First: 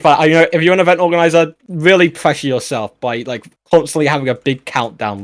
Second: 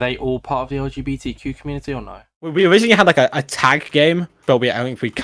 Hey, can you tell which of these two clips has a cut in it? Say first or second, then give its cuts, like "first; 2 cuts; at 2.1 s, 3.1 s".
second; 1 cut; at 2.5 s